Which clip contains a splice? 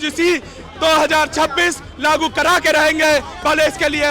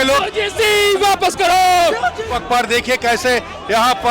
second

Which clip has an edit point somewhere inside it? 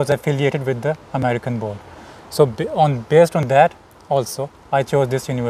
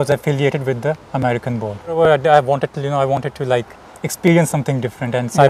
second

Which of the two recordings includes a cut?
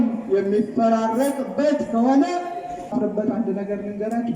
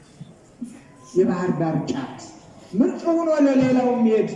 first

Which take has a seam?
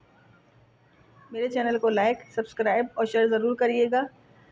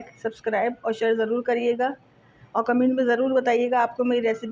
first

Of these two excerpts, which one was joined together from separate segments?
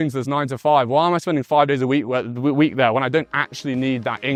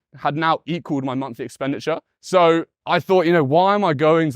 second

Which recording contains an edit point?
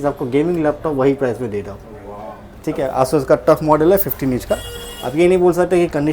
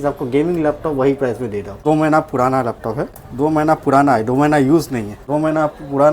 second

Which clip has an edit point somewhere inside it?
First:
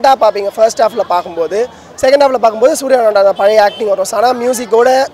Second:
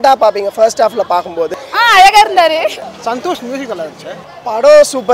second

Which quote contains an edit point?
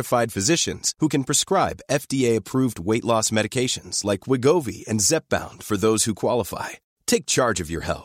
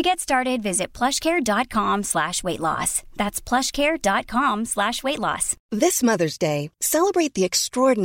second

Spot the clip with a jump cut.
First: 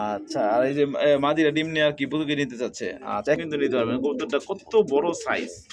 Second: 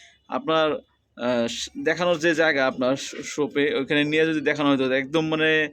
first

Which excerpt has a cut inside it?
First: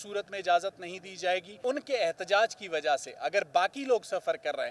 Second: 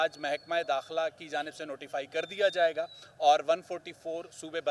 first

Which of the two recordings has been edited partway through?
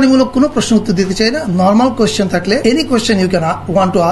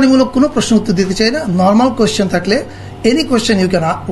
first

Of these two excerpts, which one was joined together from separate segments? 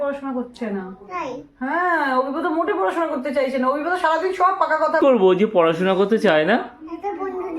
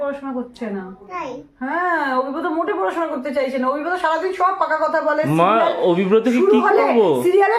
first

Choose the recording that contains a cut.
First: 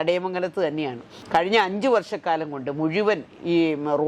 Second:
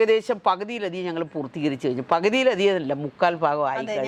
first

